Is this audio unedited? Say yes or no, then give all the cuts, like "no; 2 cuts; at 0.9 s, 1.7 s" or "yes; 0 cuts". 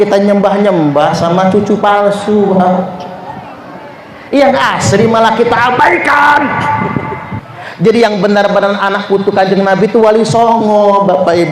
no; 1 cut; at 7.3 s